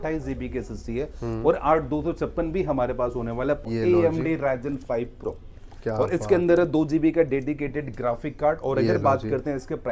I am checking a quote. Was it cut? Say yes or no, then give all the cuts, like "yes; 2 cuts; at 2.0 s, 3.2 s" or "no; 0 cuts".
yes; 1 cut; at 3.6 s